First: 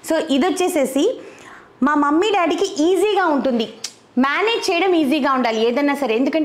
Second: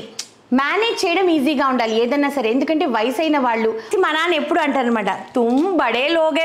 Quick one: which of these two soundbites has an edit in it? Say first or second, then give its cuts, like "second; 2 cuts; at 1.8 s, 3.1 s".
second; 1 cut; at 3.9 s